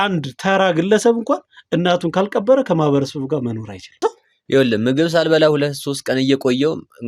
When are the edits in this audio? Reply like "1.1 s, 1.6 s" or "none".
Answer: 4.0 s